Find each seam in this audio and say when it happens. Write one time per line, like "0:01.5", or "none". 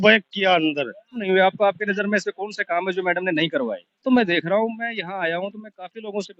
0:01.3
0:04.0